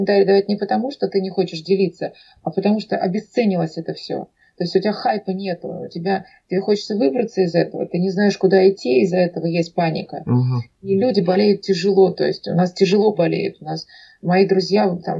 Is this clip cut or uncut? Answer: uncut